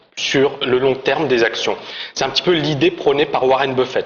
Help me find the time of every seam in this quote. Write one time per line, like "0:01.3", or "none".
none